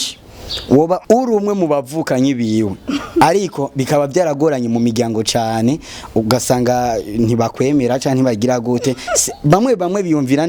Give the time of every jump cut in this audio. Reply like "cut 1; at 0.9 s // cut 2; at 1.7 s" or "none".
cut 1; at 1.0 s